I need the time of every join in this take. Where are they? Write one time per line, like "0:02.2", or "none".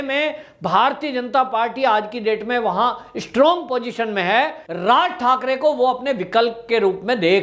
0:04.6